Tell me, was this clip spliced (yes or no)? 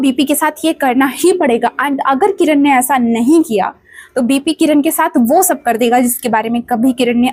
no